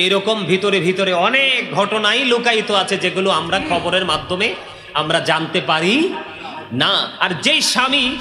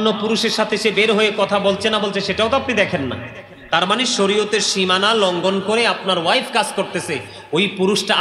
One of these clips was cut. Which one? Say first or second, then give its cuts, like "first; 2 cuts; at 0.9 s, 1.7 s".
first; 1 cut; at 7.1 s